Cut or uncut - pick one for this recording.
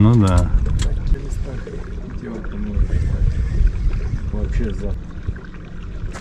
cut